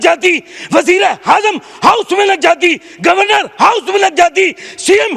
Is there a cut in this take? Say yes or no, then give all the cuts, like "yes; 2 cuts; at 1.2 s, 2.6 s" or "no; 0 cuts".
no; 0 cuts